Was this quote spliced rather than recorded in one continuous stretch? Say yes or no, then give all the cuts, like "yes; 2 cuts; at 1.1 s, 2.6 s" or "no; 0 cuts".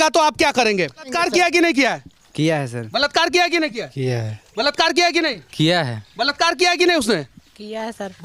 yes; 1 cut; at 1.1 s